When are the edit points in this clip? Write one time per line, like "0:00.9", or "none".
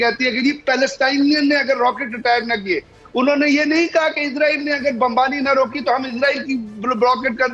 none